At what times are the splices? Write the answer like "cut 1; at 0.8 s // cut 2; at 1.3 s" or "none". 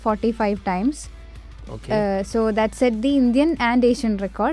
none